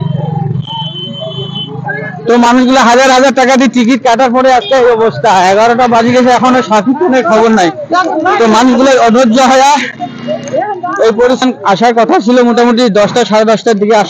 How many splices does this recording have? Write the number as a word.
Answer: one